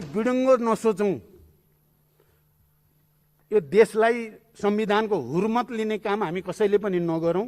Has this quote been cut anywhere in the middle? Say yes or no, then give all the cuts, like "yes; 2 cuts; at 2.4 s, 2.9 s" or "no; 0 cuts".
no; 0 cuts